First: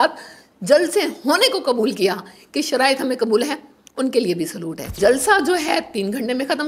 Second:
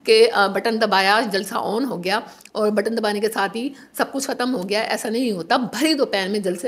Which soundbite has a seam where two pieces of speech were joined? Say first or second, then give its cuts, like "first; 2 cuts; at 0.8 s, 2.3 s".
first; 1 cut; at 5.0 s